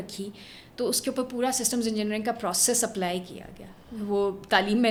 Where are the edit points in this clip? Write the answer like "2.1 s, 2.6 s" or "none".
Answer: none